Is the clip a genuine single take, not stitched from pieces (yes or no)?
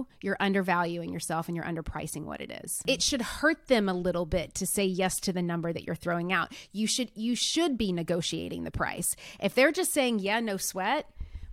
yes